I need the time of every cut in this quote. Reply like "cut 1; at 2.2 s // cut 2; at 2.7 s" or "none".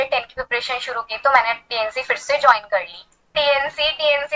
cut 1; at 3.3 s